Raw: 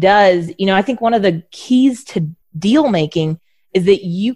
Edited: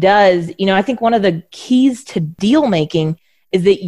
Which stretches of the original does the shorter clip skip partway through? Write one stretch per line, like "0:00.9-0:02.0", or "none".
0:02.2-0:02.5